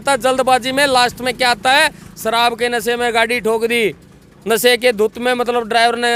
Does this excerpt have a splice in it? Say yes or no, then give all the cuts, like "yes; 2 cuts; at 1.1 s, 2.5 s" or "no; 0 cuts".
no; 0 cuts